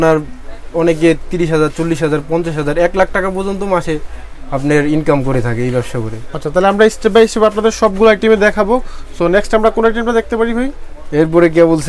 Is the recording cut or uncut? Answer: uncut